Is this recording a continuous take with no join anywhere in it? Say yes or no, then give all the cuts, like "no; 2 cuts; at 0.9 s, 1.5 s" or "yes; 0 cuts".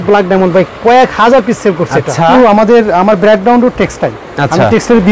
no; 1 cut; at 2.3 s